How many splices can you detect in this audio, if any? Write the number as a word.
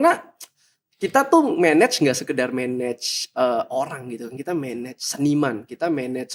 zero